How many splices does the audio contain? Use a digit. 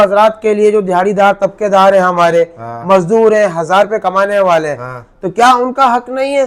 0